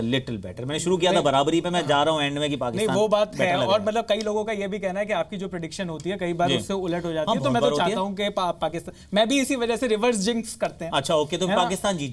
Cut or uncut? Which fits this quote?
uncut